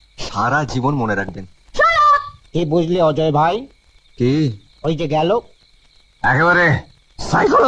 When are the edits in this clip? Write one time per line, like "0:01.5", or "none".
0:02.4

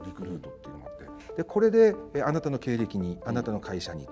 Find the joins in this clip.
0:01.1

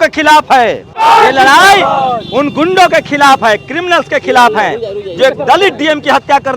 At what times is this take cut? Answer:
0:01.0

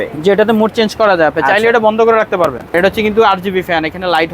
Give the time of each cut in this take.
0:02.7

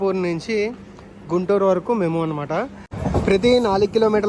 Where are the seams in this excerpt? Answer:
0:02.9

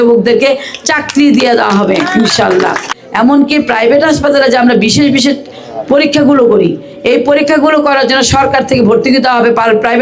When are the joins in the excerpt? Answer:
0:02.9

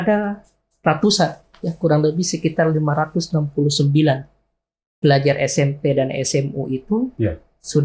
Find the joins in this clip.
none

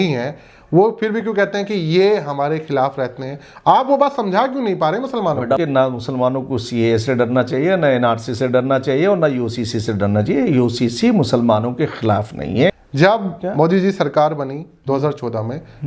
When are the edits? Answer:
0:05.6
0:12.8

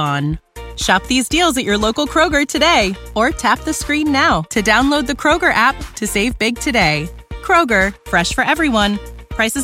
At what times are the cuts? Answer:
none

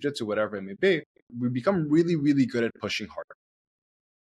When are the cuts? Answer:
0:01.3

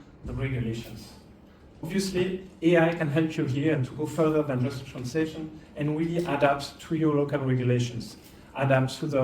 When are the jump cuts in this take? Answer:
0:01.9

